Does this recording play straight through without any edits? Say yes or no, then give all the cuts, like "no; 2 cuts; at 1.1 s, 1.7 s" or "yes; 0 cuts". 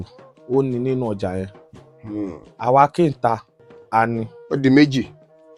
yes; 0 cuts